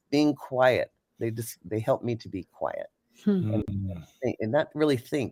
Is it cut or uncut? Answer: uncut